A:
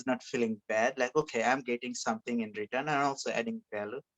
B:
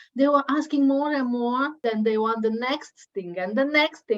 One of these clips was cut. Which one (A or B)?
B